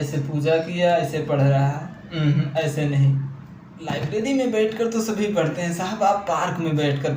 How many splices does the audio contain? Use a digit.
1